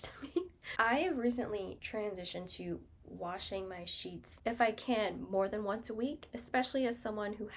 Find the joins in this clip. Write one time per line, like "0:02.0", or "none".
none